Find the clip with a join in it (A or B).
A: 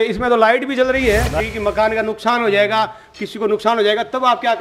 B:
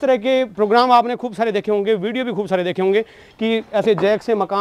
A